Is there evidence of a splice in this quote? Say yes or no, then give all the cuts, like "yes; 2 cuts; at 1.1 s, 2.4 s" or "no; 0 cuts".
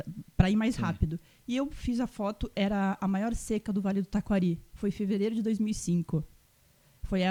no; 0 cuts